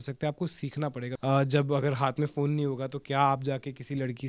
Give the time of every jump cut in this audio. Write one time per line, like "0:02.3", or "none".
0:01.1